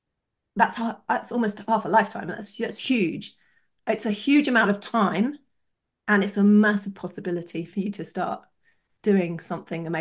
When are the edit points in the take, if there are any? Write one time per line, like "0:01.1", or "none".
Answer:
none